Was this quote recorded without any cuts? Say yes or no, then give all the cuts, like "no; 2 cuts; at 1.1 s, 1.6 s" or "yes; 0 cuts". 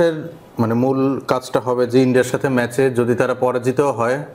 yes; 0 cuts